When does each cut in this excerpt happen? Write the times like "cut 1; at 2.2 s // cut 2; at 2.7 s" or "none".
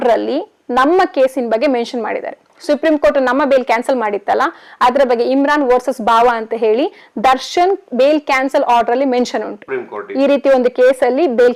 none